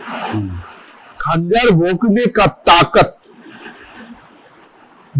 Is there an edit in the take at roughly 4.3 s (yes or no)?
no